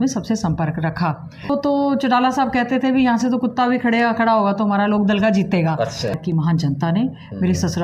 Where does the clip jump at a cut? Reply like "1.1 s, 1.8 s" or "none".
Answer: 1.5 s, 6.2 s